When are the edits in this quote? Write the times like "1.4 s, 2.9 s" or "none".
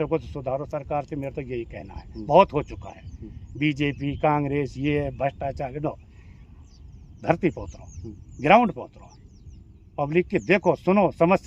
none